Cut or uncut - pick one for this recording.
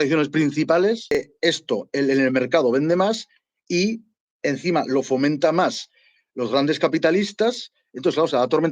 cut